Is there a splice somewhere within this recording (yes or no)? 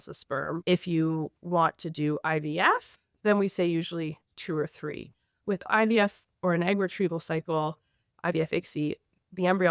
yes